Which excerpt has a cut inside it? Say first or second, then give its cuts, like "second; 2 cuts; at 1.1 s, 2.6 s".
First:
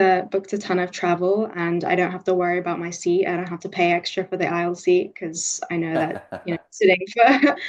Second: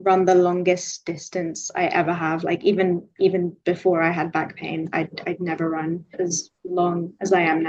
second; 1 cut; at 6.1 s